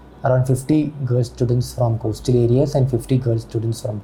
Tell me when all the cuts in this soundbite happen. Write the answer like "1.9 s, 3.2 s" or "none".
none